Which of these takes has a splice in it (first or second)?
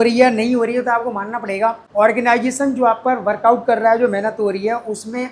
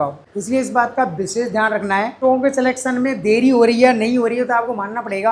second